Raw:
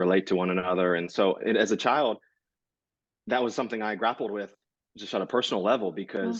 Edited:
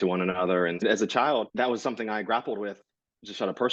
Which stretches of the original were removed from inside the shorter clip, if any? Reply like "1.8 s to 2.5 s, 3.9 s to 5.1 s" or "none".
1.1 s to 1.5 s, 2.2 s to 3.2 s